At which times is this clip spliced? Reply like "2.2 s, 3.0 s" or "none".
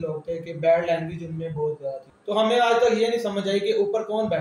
2.1 s

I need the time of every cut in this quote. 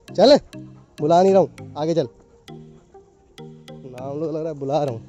2.1 s, 3.8 s

